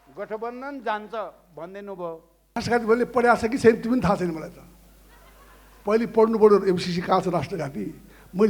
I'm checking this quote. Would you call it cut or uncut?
cut